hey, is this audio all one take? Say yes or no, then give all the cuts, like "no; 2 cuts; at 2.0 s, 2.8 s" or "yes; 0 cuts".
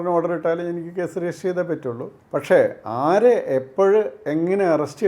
no; 1 cut; at 2.1 s